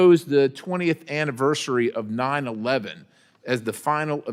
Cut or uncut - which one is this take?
uncut